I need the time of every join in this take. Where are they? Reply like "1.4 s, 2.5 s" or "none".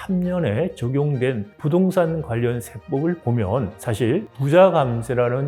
none